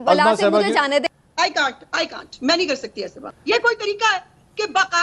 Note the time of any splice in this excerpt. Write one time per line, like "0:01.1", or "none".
0:01.1
0:03.2